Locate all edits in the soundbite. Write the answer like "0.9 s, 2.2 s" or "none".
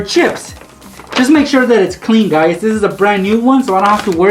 none